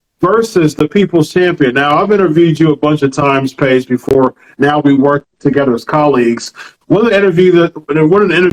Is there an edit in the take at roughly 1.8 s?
no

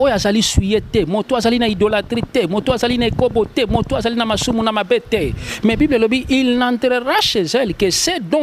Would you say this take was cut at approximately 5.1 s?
no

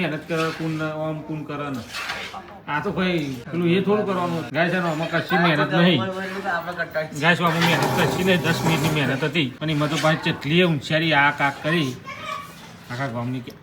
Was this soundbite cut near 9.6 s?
yes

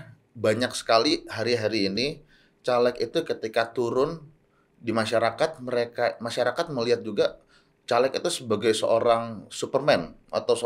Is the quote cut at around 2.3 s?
no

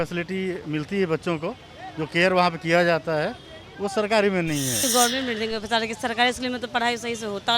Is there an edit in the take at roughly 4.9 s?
yes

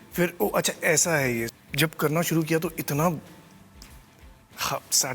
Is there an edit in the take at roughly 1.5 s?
yes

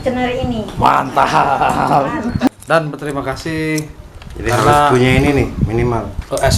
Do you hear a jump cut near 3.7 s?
no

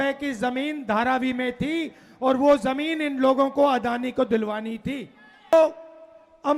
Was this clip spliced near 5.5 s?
yes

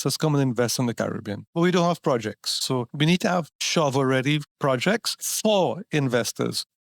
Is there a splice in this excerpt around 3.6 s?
yes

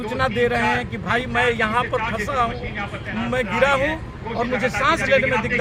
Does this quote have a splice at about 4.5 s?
no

